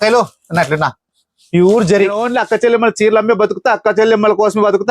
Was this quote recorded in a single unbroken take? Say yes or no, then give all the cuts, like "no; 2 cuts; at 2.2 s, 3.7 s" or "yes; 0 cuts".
no; 1 cut; at 2.2 s